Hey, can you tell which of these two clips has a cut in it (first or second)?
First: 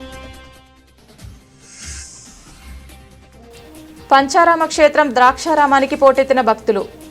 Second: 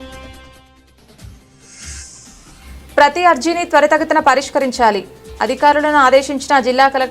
second